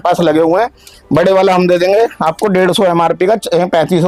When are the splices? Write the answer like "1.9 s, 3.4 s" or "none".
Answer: none